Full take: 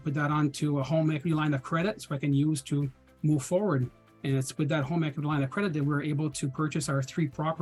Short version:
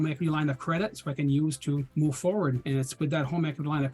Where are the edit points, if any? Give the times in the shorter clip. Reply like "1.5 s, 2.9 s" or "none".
1.9 s, 2.6 s

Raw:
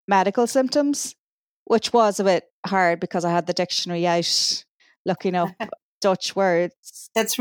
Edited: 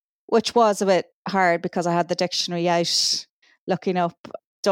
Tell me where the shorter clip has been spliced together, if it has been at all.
none

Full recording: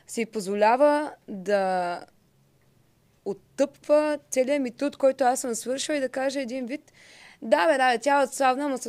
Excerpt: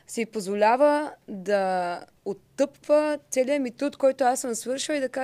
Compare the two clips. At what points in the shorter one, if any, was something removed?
2.1 s

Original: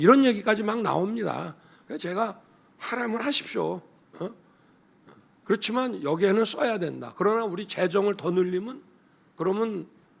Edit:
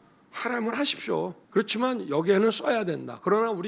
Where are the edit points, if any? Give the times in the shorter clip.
1.4 s

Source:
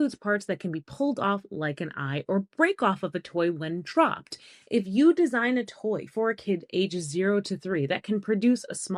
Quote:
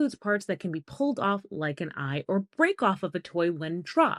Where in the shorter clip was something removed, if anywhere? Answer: none

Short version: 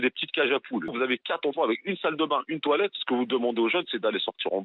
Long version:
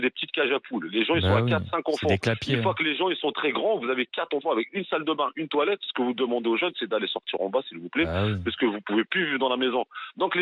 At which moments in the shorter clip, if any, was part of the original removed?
0.9 s

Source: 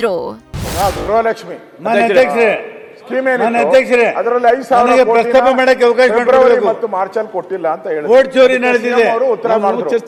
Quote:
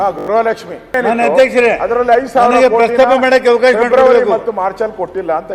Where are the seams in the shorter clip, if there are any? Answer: 0.9 s

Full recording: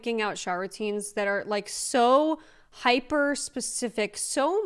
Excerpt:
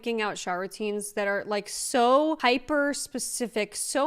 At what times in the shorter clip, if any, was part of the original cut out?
2.4 s

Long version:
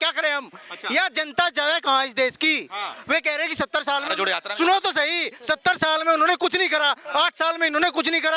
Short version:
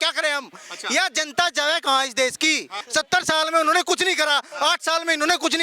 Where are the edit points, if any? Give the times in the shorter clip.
2.8 s

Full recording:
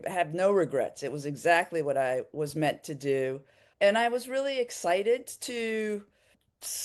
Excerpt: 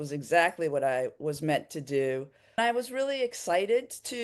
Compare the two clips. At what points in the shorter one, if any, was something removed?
2.6 s

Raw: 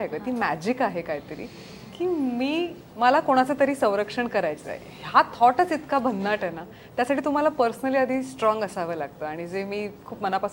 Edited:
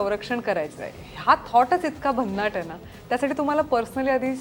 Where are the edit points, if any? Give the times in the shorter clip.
none

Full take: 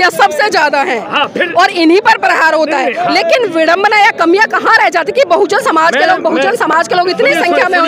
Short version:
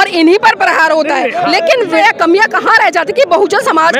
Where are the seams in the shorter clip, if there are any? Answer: 2.0 s

